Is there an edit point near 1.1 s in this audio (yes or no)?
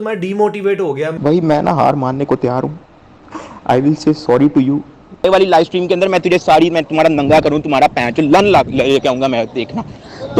yes